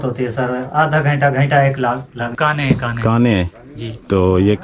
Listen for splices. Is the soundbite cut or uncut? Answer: cut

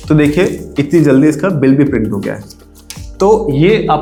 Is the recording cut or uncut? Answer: uncut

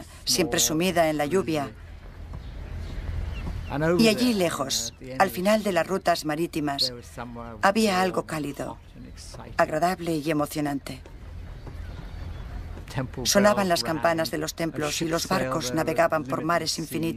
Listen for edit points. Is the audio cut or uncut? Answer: uncut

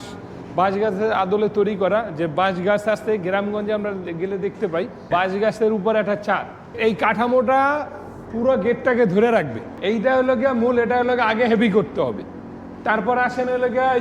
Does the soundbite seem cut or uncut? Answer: cut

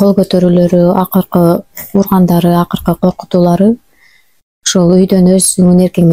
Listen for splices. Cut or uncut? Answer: uncut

